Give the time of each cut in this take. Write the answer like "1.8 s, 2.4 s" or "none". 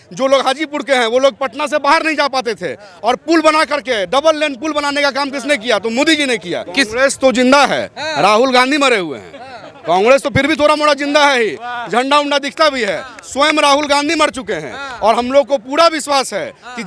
6.6 s

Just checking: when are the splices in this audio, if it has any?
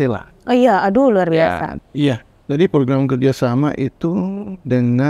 1.7 s

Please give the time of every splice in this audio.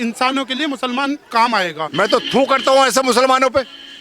1.9 s

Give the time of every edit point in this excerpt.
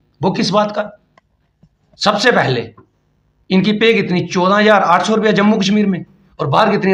none

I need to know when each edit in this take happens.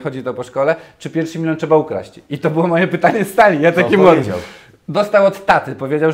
none

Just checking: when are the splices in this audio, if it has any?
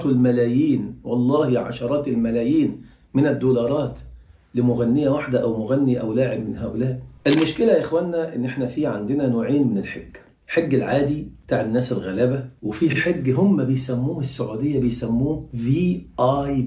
7.1 s

